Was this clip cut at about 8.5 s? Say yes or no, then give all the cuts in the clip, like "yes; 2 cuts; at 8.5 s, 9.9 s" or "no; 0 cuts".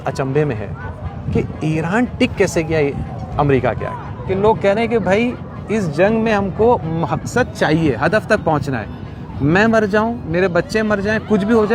no; 1 cut; at 4.1 s